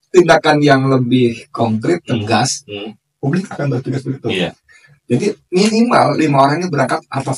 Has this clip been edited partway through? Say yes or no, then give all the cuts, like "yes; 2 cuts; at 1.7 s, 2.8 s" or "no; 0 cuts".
no; 0 cuts